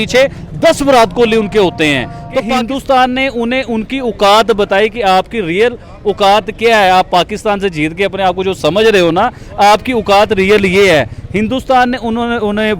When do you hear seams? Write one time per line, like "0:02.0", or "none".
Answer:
0:02.5